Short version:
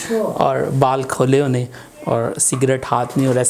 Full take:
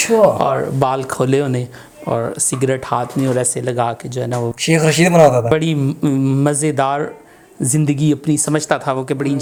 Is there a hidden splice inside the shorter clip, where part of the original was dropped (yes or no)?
no